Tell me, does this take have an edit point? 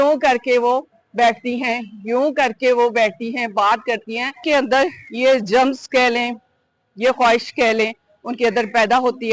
yes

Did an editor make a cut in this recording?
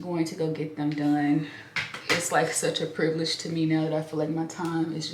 no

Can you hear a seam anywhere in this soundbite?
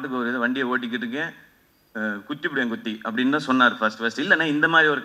no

